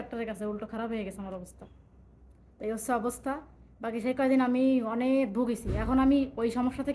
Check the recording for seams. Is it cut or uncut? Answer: uncut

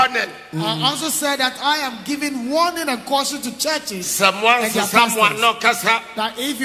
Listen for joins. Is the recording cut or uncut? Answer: uncut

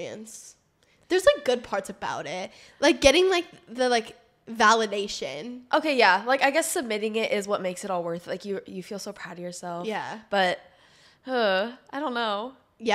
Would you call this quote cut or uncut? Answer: uncut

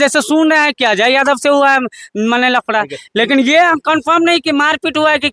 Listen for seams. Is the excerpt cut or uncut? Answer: uncut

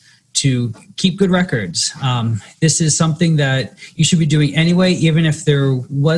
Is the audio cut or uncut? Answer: uncut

